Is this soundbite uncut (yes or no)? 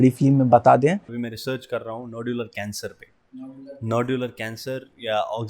no